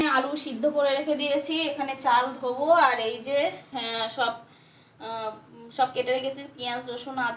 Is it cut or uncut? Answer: uncut